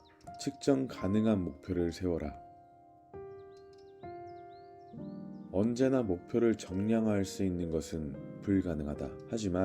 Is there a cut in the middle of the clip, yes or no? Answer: yes